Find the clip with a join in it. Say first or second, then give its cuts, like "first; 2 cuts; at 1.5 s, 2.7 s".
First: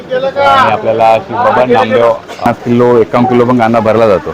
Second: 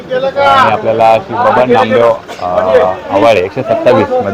first; 1 cut; at 2.5 s